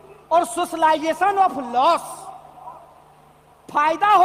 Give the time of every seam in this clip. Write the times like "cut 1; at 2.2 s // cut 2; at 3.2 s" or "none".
none